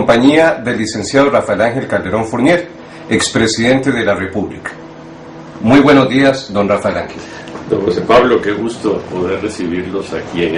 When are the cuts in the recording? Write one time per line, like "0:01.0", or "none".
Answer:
0:01.5

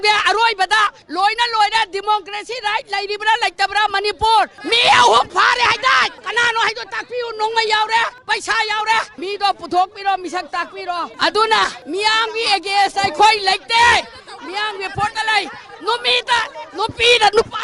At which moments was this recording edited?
0:04.6
0:08.2
0:09.1
0:11.1

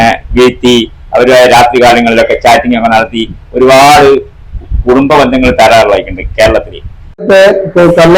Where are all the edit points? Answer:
0:07.2

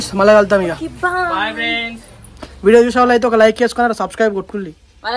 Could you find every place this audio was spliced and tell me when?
none

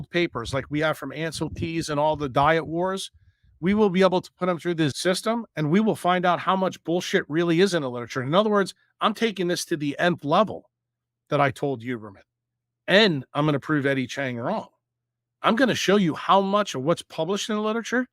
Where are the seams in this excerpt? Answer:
0:05.0

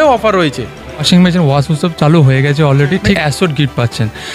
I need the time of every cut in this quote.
0:00.9
0:03.2

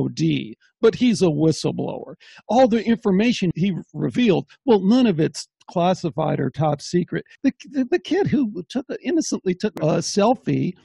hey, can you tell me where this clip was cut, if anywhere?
0:03.5
0:07.3
0:09.7

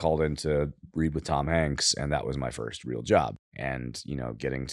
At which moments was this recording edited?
0:03.4

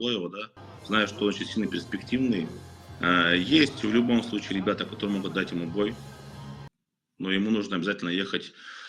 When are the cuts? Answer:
none

